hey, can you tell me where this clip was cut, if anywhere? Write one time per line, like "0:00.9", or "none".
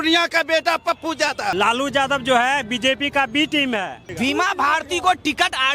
0:01.5
0:04.0